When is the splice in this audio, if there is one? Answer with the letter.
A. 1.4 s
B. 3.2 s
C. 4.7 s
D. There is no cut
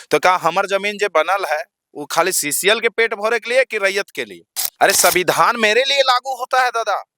C